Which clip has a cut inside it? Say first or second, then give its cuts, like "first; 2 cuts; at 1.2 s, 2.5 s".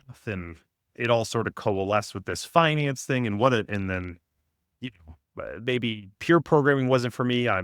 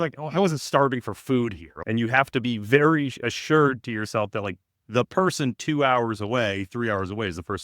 second; 1 cut; at 1.7 s